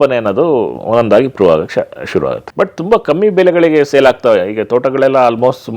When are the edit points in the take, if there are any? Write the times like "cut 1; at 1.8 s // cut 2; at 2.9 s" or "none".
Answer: cut 1; at 2.4 s